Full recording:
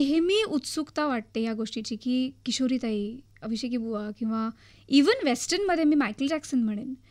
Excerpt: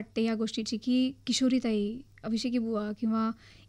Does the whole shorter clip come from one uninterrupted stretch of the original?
yes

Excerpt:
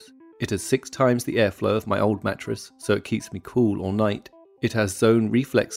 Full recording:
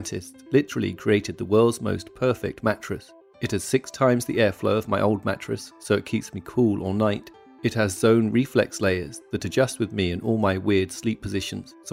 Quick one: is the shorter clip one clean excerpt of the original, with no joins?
yes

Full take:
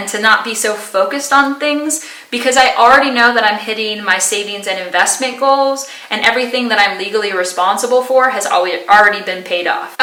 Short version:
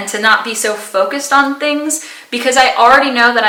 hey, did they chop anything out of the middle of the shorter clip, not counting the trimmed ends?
no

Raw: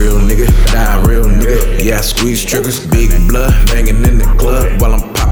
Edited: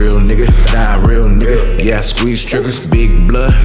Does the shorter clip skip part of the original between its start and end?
no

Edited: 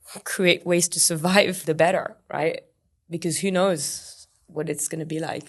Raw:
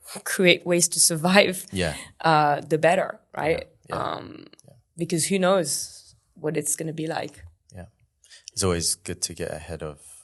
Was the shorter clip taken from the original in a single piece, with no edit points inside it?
no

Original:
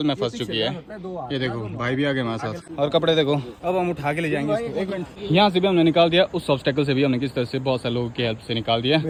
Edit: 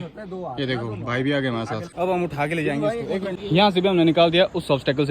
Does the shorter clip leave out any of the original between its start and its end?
yes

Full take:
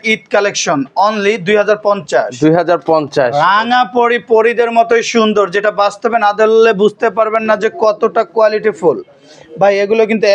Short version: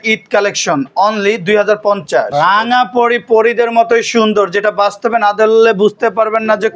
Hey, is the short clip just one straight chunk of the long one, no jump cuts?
no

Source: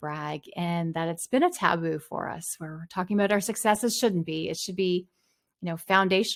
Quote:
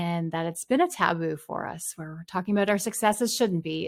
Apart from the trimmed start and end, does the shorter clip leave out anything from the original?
no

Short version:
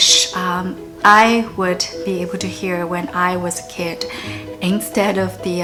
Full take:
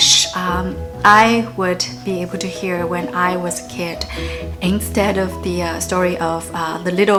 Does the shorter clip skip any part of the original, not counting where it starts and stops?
no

